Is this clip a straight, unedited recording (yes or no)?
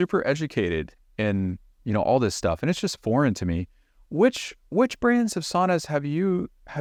yes